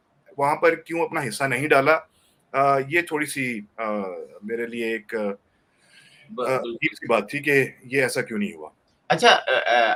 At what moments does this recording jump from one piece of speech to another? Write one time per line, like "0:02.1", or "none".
none